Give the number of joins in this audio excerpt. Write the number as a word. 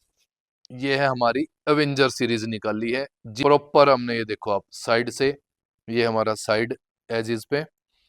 one